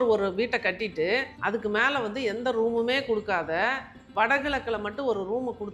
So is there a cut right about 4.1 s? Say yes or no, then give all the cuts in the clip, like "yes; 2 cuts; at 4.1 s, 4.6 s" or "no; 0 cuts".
no; 1 cut; at 1.3 s